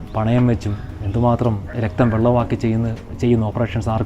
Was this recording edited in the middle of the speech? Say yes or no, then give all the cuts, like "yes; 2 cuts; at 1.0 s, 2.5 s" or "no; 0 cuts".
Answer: yes; 1 cut; at 1.7 s